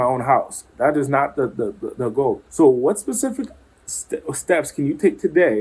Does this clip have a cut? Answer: yes; 1 cut; at 2.4 s

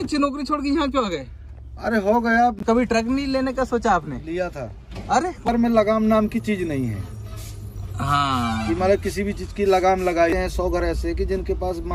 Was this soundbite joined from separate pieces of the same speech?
yes; 3 cuts; at 2.6 s, 5.5 s, 10.4 s

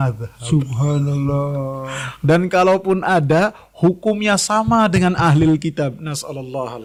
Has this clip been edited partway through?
no; 0 cuts

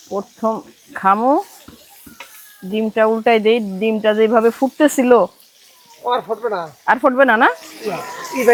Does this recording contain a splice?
no; 0 cuts

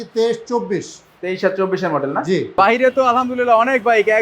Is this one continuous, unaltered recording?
no; 1 cut; at 2.6 s

